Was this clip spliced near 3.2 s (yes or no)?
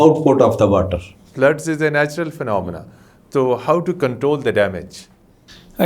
no